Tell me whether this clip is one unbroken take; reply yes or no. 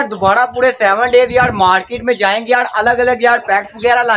yes